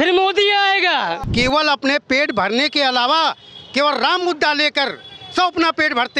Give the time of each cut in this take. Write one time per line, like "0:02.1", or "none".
0:01.2